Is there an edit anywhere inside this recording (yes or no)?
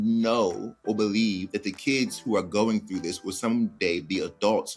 no